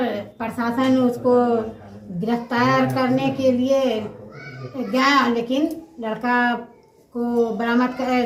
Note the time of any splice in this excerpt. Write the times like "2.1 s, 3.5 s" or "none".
none

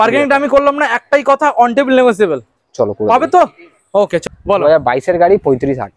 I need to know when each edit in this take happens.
4.2 s

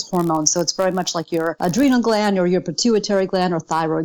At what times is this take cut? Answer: 1.6 s

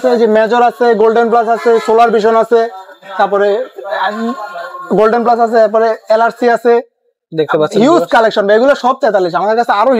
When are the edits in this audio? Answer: none

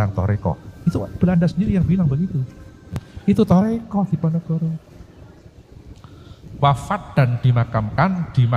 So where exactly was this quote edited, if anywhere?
3.1 s

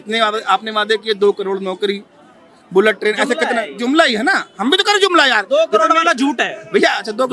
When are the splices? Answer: none

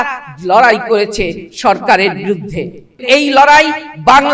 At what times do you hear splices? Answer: 3.0 s

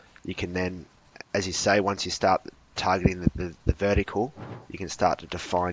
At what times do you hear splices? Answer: none

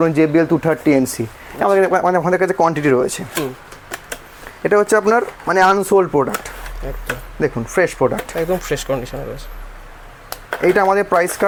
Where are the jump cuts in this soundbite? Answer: none

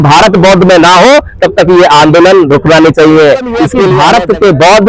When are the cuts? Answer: 3.9 s

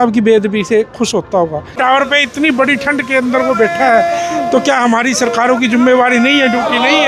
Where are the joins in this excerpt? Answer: 1.8 s

